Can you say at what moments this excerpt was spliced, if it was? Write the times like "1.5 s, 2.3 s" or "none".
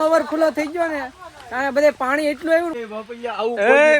2.7 s